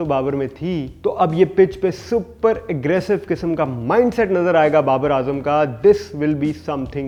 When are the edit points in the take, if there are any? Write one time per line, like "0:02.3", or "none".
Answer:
none